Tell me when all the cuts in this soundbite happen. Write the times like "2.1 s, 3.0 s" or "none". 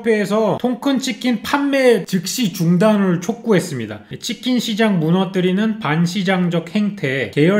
none